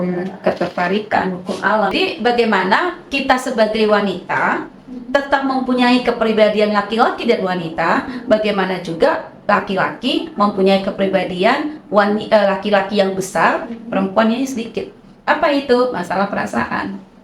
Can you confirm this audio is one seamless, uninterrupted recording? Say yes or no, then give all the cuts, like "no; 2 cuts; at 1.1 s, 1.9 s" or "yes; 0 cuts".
no; 1 cut; at 1.9 s